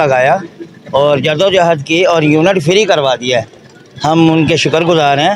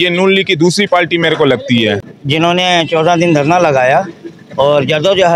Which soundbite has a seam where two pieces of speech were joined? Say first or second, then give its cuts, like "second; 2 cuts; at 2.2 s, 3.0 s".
second; 1 cut; at 2.0 s